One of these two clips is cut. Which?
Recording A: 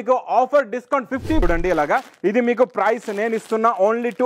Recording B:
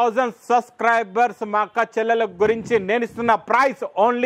A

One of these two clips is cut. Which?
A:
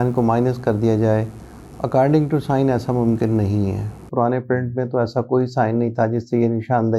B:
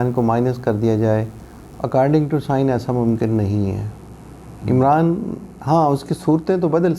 A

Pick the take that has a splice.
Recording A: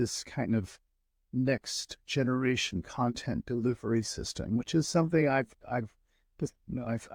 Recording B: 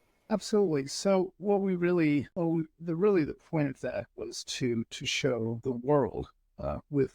B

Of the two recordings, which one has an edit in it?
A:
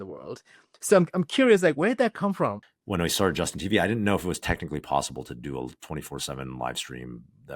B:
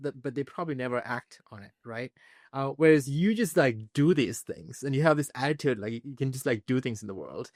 A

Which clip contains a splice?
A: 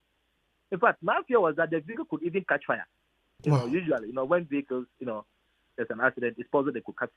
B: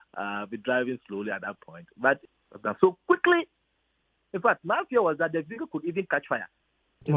B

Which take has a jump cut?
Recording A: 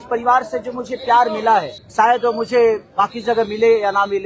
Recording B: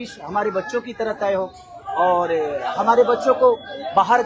A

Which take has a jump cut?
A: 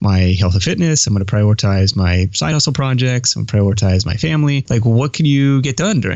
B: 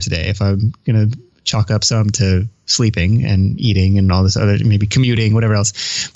A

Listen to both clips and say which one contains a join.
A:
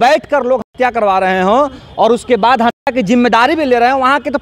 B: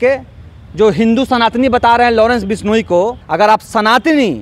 B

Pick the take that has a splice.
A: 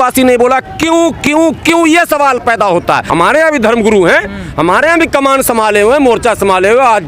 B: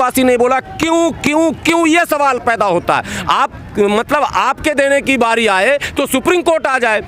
A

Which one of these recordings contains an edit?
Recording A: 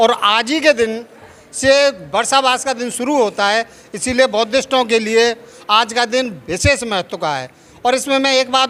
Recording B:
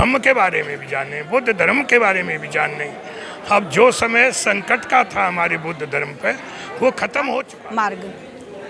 B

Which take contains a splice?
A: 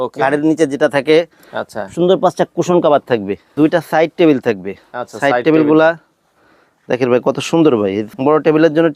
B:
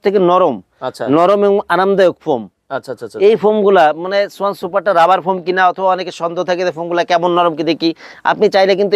A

